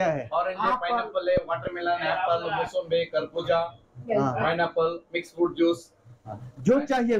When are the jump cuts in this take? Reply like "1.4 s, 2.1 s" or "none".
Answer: none